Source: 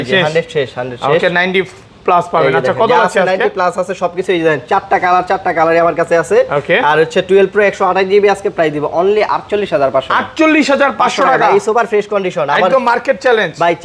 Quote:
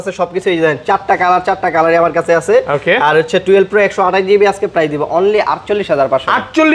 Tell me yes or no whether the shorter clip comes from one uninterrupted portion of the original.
yes